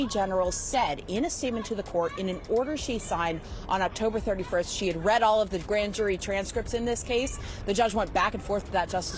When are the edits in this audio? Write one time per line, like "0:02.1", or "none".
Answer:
none